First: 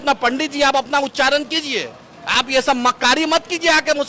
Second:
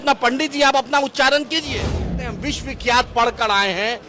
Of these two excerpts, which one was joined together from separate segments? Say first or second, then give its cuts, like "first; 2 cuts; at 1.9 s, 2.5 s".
second; 1 cut; at 2.2 s